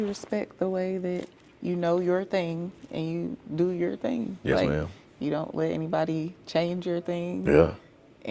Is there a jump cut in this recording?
no; 0 cuts

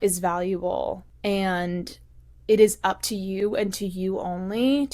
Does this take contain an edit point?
yes; 1 cut; at 1.1 s

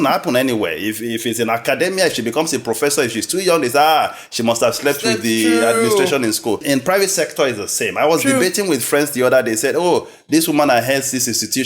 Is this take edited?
yes; 1 cut; at 6.6 s

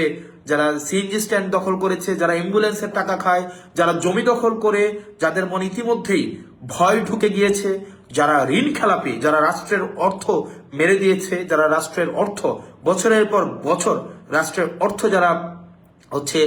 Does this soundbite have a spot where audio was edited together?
no; 0 cuts

